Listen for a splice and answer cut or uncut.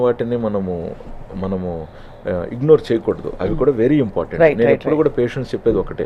uncut